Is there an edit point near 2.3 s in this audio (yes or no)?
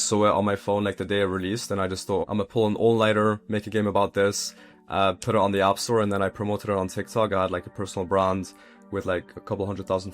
yes